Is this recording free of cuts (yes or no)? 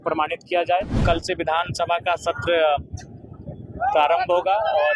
no